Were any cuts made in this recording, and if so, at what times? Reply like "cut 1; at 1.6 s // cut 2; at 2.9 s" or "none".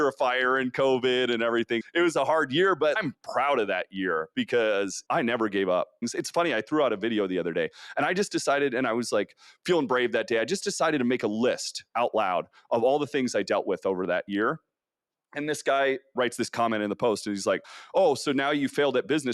cut 1; at 5.0 s // cut 2; at 6.0 s